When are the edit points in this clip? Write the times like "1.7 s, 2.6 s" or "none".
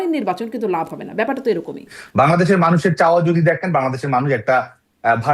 2.0 s